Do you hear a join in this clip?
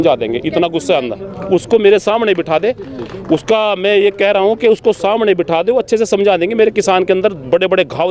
no; 0 cuts

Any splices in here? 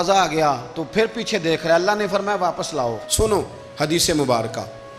yes; 1 cut; at 3.0 s

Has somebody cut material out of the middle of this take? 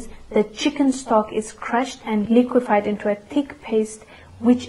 yes; 1 cut; at 2.3 s

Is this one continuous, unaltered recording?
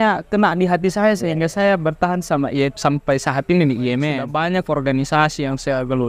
no; 1 cut; at 4.2 s

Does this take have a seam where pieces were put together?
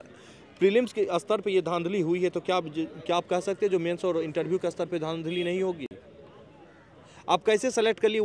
no; 0 cuts

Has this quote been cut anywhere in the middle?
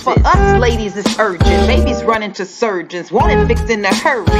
no; 0 cuts

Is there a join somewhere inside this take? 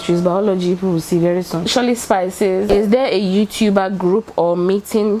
no; 0 cuts

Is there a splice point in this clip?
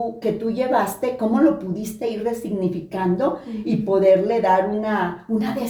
no; 0 cuts

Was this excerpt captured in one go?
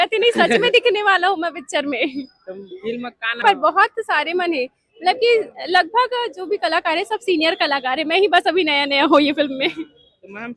no; 1 cut; at 3.4 s

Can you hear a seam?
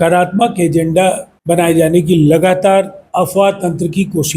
yes; 2 cuts; at 1.3 s, 3.0 s

